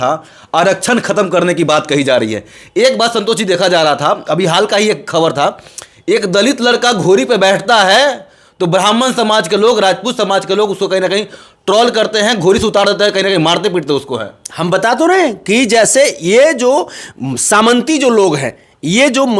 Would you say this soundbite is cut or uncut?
uncut